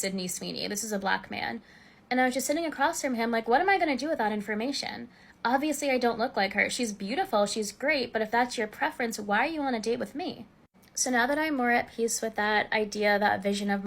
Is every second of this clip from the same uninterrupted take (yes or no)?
no